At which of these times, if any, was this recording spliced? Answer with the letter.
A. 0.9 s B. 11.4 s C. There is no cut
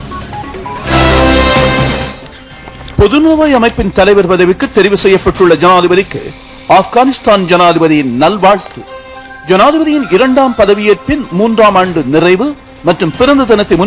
A